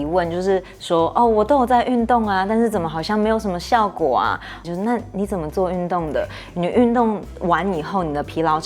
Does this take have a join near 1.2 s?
no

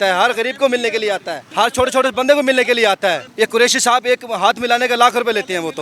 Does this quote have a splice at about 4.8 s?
no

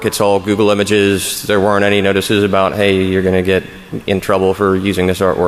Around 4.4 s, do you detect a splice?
no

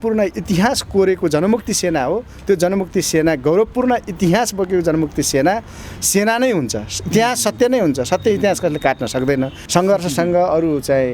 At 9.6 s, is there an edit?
yes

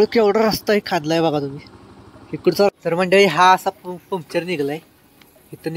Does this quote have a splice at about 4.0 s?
no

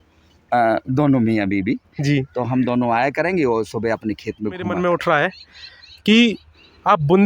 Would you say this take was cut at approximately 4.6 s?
yes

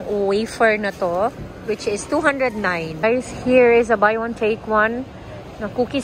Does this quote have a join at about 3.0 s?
yes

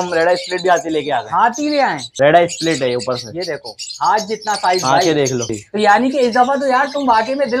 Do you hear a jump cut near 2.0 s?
yes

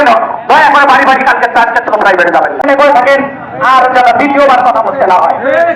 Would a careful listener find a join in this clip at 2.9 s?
yes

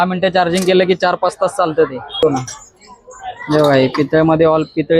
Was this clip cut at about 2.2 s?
yes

